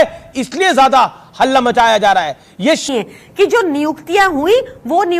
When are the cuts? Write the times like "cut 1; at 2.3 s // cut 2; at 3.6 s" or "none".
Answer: cut 1; at 2.8 s